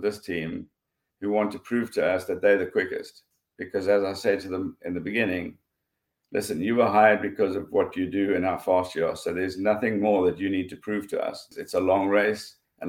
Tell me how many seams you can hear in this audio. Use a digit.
1